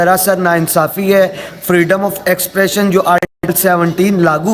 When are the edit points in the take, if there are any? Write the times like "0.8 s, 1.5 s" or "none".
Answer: none